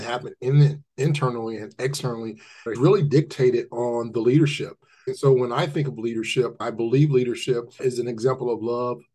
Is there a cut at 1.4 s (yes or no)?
no